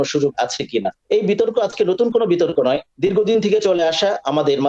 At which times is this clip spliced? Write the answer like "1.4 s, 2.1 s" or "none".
1.0 s, 2.9 s

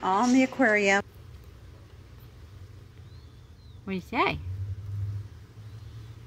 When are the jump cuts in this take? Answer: 1.1 s

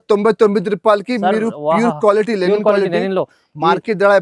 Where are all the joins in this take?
none

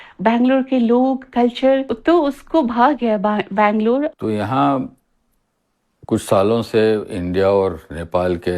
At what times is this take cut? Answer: 1.9 s, 4.1 s

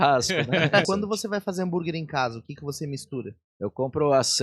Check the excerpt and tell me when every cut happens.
0.8 s, 3.4 s

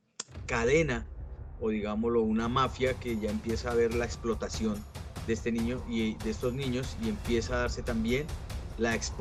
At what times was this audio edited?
none

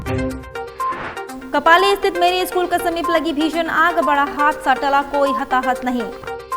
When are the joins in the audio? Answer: 1.2 s

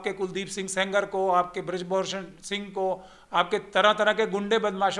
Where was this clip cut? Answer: none

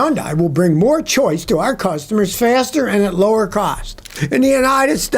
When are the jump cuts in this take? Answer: 4.2 s

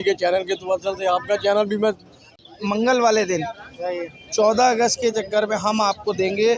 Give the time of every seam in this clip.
2.4 s

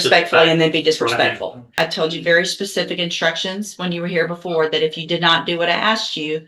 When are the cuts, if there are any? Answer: 1.8 s

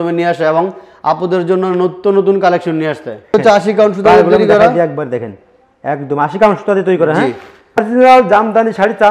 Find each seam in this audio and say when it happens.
3.3 s, 7.8 s

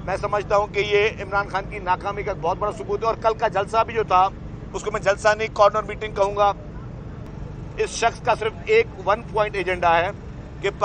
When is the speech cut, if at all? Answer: 7.4 s

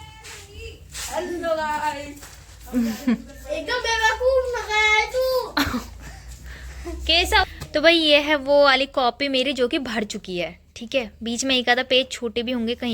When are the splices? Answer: 7.4 s

